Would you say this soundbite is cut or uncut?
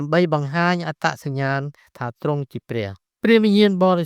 cut